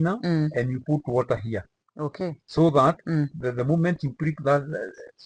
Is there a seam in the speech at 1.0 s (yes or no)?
no